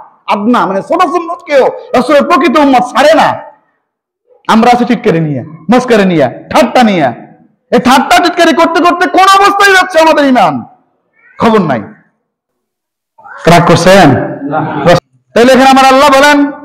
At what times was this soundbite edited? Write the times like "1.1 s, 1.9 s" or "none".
15.0 s